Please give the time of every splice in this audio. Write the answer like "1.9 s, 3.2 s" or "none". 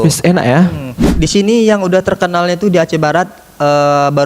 1.0 s